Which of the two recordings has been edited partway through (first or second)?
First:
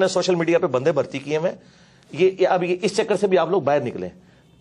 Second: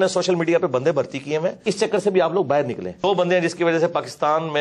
second